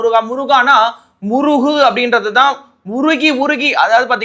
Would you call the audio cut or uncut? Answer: uncut